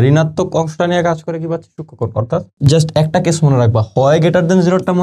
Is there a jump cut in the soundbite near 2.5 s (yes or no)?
yes